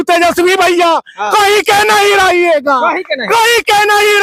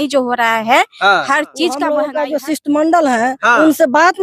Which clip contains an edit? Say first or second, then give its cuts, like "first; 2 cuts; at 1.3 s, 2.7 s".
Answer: second; 1 cut; at 2.0 s